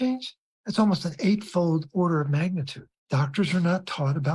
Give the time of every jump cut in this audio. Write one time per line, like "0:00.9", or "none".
0:02.9